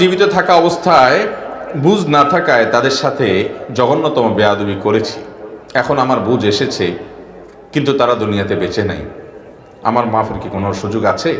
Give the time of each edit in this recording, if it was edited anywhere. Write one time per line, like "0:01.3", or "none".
none